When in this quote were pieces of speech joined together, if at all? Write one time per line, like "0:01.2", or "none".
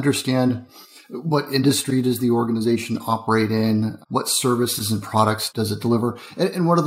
0:05.5